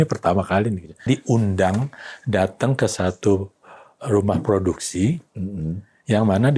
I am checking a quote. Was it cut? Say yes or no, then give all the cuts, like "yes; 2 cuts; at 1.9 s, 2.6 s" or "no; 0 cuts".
yes; 1 cut; at 1.0 s